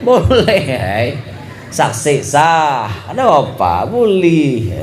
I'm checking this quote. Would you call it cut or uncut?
uncut